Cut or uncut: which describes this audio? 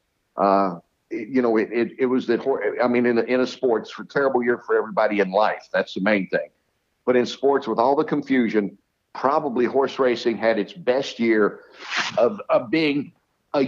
uncut